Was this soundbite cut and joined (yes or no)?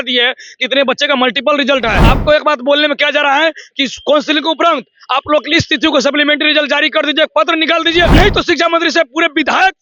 yes